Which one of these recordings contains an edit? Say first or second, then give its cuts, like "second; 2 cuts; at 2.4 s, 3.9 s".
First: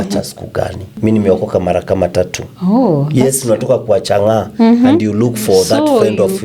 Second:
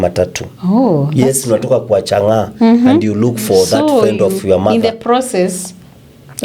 first; 1 cut; at 1.0 s